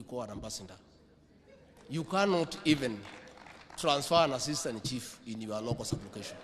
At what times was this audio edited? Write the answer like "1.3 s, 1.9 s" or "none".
none